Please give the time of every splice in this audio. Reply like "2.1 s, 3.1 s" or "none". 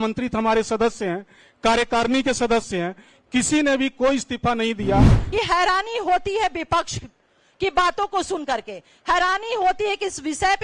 5.2 s